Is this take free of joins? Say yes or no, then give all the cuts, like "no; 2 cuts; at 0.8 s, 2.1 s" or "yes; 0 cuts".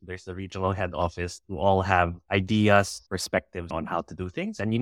no; 3 cuts; at 0.9 s, 2.2 s, 3.3 s